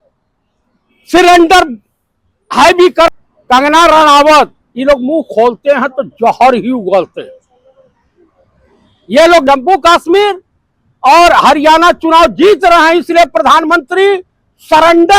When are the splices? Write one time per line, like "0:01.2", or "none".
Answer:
0:03.1
0:09.4